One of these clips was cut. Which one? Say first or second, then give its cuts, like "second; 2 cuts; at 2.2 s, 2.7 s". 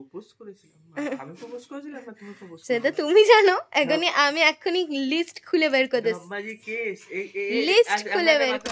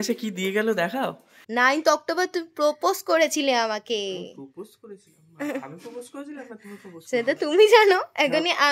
second; 1 cut; at 1.1 s